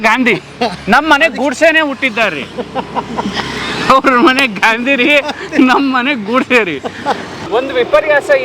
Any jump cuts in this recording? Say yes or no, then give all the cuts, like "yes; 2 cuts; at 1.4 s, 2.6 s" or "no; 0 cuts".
yes; 1 cut; at 7.4 s